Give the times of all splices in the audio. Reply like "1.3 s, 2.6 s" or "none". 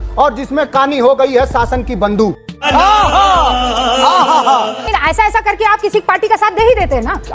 4.8 s